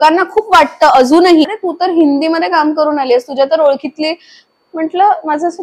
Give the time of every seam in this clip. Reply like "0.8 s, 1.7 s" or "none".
1.5 s